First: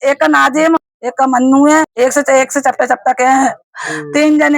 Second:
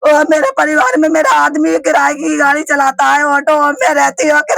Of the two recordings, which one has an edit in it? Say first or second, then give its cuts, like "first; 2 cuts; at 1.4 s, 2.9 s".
first; 2 cuts; at 0.9 s, 1.9 s